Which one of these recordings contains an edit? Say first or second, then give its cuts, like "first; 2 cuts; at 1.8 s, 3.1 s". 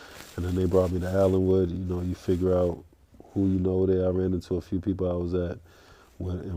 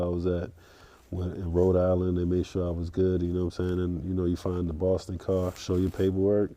second; 1 cut; at 5.6 s